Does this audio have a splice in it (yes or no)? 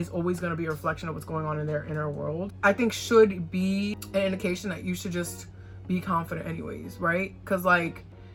no